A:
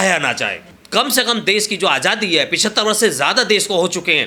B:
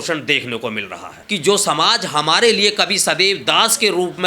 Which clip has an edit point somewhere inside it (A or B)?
B